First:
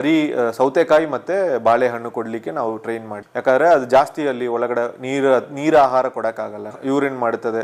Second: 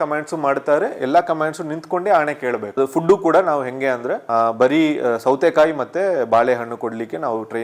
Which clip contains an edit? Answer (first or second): second